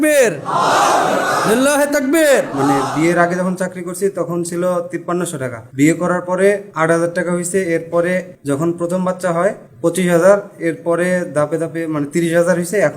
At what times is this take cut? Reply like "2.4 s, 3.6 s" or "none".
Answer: 2.3 s, 5.2 s, 6.7 s, 8.3 s, 9.7 s